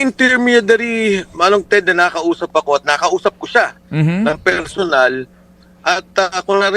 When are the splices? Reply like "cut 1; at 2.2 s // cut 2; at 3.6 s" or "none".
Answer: cut 1; at 5.3 s